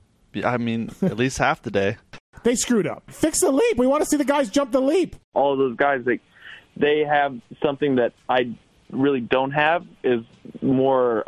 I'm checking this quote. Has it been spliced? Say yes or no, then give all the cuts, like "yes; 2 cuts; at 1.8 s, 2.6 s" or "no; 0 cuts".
yes; 3 cuts; at 2.3 s, 3.0 s, 5.3 s